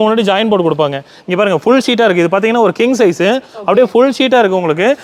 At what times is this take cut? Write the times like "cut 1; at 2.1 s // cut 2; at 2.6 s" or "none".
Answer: none